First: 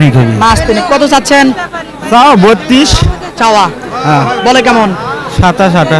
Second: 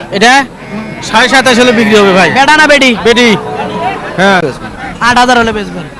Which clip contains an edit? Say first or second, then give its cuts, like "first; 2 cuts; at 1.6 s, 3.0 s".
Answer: second; 1 cut; at 4.5 s